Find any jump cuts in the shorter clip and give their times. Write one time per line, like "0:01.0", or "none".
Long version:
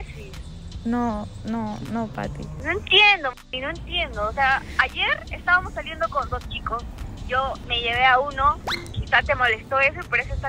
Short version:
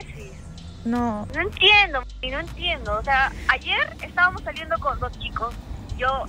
0:01.3